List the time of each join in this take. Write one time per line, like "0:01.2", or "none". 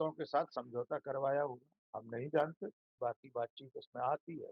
0:02.9